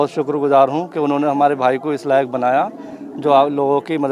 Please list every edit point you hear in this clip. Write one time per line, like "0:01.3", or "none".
none